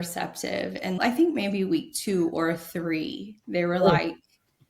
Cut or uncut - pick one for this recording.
cut